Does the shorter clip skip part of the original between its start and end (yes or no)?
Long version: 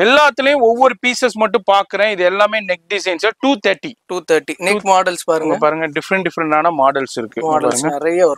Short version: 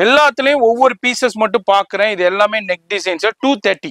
no